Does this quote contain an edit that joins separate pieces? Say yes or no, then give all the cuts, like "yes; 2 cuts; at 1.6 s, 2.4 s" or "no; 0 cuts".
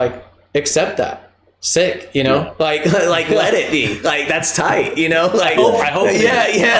no; 0 cuts